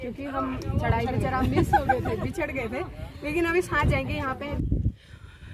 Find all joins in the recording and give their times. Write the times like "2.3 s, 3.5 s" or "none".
4.5 s

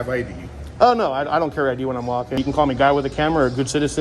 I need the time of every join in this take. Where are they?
2.3 s

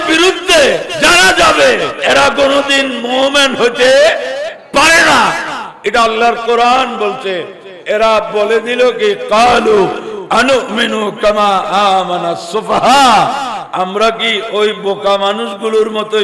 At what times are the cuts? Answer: 0.9 s, 2.0 s

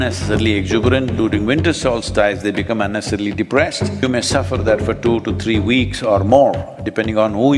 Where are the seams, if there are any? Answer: 4.0 s

